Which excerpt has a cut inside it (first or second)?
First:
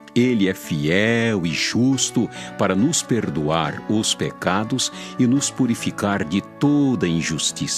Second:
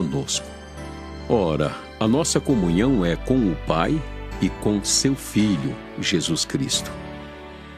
second